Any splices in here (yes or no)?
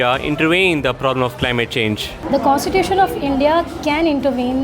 no